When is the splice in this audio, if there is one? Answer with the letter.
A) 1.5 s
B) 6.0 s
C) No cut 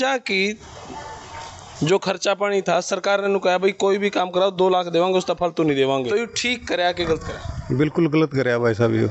B